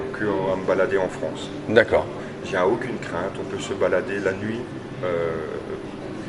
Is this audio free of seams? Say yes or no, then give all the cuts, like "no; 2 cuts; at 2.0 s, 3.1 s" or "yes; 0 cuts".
yes; 0 cuts